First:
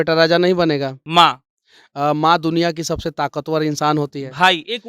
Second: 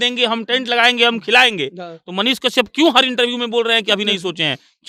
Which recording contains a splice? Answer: first; 1 cut; at 1.0 s

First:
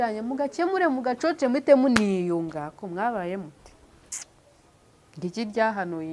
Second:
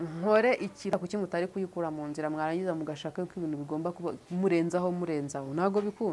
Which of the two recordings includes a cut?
second; 1 cut; at 0.9 s

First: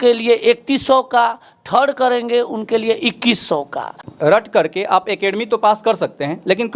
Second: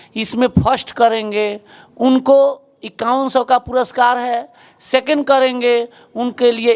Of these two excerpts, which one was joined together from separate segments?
first; 1 cut; at 4.1 s

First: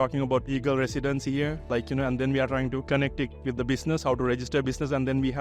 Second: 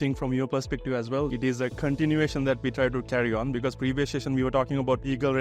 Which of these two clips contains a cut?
second; 1 cut; at 1.3 s

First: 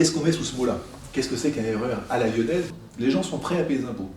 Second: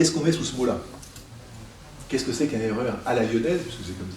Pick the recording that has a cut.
first; 2 cuts; at 1.0 s, 2.8 s

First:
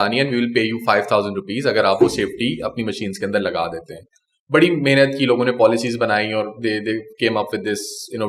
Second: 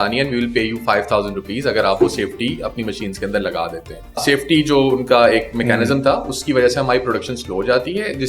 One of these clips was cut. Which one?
second; 1 cut; at 4.2 s

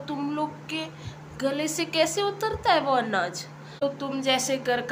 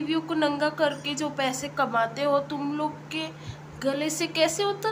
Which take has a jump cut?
first; 1 cut; at 3.8 s

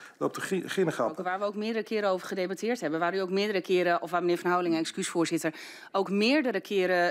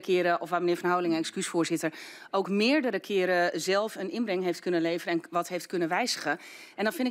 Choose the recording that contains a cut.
first; 1 cut; at 1.2 s

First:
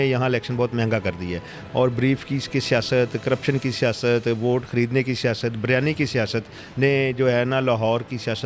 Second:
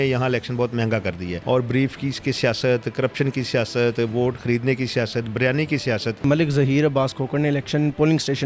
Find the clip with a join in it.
second; 2 cuts; at 1.3 s, 6.2 s

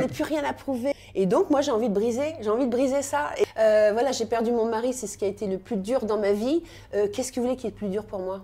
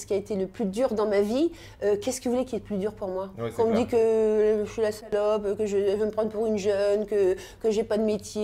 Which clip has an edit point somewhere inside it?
first; 2 cuts; at 0.9 s, 3.5 s

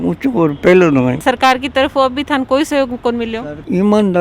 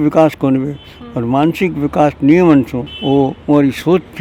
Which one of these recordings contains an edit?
first; 1 cut; at 1.2 s

